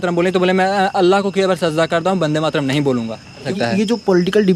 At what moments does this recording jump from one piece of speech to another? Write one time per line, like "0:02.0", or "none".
0:03.5